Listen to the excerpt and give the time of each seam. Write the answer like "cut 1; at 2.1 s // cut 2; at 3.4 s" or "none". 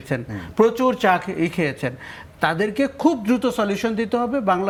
none